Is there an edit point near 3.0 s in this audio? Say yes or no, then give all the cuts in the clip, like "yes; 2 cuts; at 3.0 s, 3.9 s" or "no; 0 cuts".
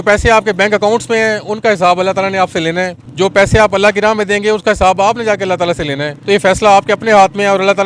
yes; 2 cuts; at 3.0 s, 6.1 s